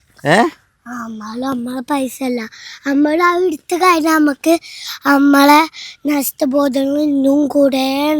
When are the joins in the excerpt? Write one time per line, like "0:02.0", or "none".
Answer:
none